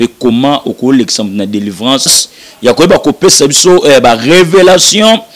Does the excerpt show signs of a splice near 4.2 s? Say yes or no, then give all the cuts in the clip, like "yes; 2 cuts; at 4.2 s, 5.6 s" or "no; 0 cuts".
no; 1 cut; at 2.3 s